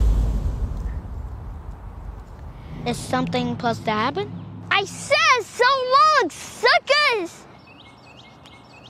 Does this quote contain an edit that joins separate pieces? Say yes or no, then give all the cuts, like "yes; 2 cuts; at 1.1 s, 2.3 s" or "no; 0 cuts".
no; 0 cuts